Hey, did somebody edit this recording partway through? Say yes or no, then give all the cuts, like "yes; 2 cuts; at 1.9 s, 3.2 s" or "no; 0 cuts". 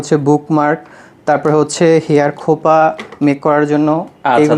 no; 0 cuts